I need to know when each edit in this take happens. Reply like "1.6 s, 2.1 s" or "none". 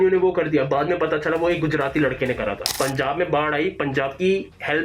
2.7 s